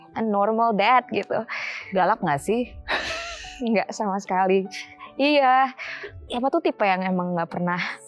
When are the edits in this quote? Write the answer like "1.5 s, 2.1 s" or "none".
none